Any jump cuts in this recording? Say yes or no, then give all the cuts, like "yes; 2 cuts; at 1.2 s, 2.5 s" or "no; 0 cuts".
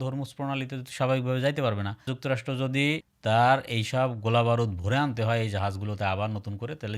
no; 0 cuts